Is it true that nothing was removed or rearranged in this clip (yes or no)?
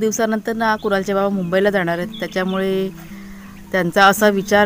yes